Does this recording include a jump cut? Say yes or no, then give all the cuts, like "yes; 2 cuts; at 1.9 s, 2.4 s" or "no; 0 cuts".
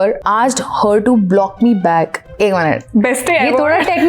no; 0 cuts